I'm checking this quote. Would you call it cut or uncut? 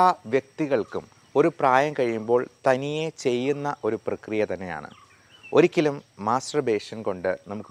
uncut